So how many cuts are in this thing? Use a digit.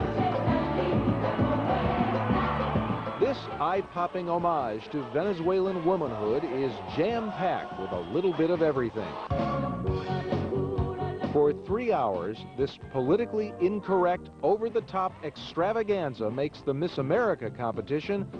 1